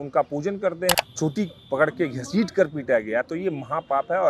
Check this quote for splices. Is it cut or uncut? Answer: cut